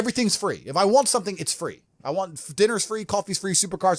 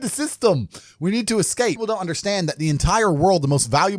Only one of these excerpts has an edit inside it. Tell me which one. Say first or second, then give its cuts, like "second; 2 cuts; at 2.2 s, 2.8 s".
second; 1 cut; at 1.8 s